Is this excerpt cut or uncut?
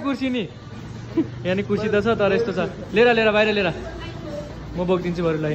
uncut